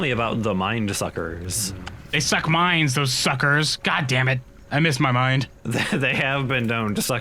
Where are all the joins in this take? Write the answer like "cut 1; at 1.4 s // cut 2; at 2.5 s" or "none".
cut 1; at 2.4 s // cut 2; at 5.6 s